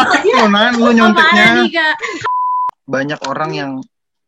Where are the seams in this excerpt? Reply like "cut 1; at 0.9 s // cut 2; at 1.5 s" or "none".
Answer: cut 1; at 2.3 s